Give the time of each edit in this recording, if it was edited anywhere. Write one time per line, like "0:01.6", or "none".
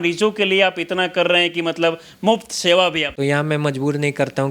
0:03.1